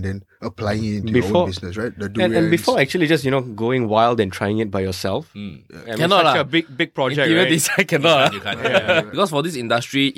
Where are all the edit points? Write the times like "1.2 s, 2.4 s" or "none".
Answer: 9.1 s